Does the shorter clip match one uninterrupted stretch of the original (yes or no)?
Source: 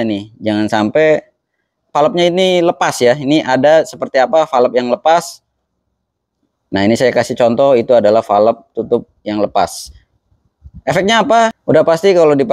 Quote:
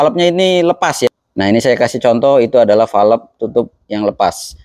no